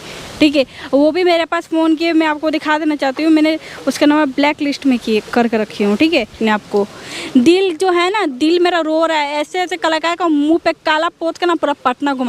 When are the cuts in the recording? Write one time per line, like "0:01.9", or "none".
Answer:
0:06.4